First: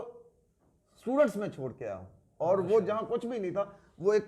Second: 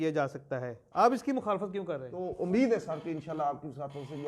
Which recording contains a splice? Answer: second; 1 cut; at 2.0 s

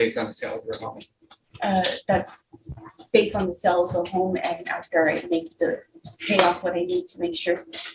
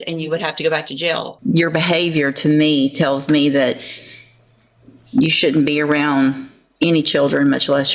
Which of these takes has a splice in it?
second; 1 cut; at 1.3 s

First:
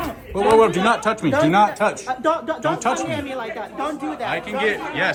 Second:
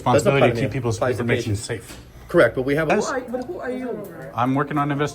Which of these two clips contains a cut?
second; 1 cut; at 2.9 s

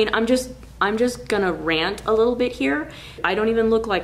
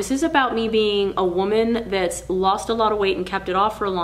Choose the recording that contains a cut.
first; 1 cut; at 3.2 s

